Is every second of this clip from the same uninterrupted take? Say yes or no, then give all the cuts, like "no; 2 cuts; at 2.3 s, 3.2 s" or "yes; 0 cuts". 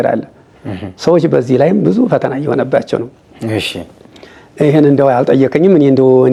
yes; 0 cuts